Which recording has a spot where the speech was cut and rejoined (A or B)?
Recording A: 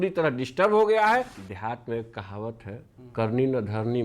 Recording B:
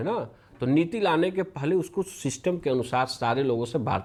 A